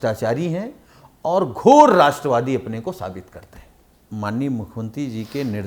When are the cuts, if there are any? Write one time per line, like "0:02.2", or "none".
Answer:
0:04.0